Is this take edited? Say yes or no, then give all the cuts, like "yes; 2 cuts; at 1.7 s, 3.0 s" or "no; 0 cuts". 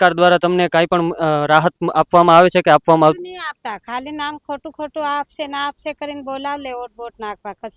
no; 0 cuts